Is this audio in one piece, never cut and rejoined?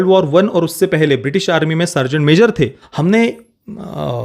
no; 1 cut; at 2.8 s

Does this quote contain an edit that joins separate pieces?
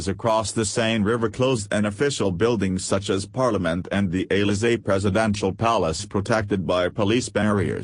no; 0 cuts

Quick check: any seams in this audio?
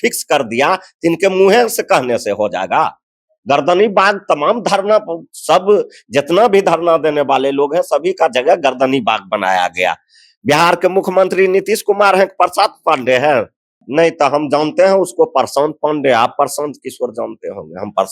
yes; 1 cut; at 13.8 s

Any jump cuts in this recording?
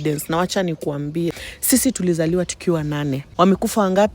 yes; 2 cuts; at 1.5 s, 3.2 s

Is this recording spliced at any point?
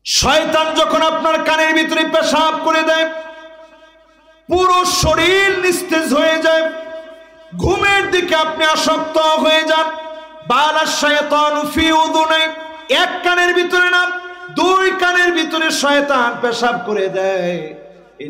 no; 0 cuts

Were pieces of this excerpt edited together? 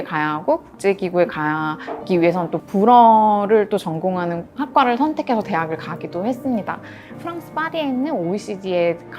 yes; 2 cuts; at 2.6 s, 7.1 s

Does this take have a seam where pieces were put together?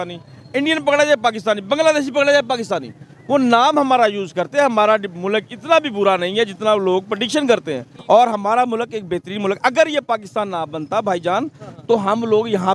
yes; 2 cuts; at 4.3 s, 8.0 s

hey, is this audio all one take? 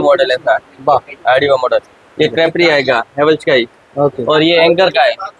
yes; 0 cuts

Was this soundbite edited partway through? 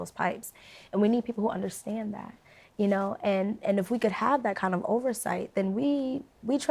no; 0 cuts

